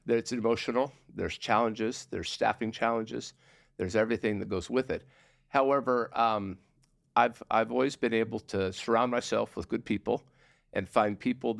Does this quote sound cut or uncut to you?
uncut